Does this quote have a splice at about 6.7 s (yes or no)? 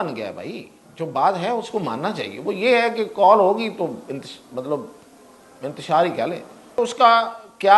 yes